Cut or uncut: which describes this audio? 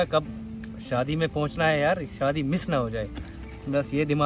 uncut